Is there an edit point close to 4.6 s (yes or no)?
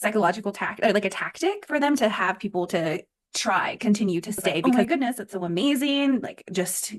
yes